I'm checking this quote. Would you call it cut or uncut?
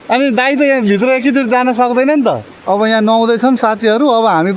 cut